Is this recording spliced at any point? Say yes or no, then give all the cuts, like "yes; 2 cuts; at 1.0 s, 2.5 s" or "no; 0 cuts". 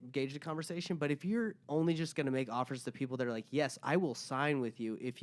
yes; 1 cut; at 1.6 s